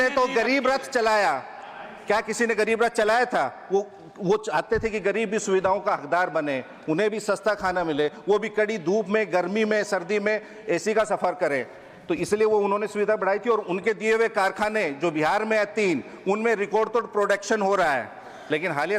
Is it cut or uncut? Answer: uncut